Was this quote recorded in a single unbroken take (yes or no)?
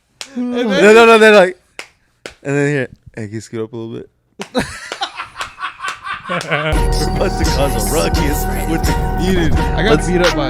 no